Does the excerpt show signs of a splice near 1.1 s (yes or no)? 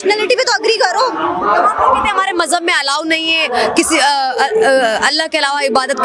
no